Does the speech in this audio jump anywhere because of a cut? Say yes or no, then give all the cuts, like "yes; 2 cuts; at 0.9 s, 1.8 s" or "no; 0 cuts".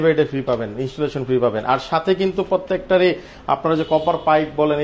no; 0 cuts